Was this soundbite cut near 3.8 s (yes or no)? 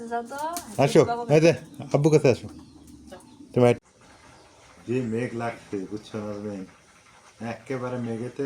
yes